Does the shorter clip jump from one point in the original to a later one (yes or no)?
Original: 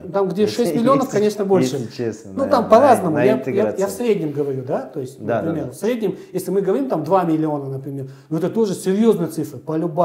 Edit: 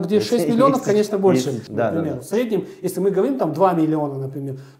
yes